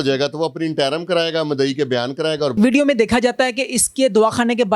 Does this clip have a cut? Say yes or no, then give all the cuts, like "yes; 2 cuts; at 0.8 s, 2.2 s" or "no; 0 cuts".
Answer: yes; 1 cut; at 2.5 s